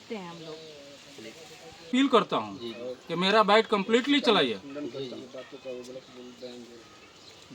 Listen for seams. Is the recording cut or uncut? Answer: cut